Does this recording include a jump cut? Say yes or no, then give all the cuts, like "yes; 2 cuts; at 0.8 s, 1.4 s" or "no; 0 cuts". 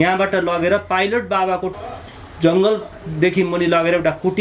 yes; 1 cut; at 1.7 s